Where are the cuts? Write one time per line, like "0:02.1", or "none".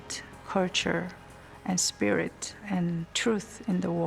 0:02.7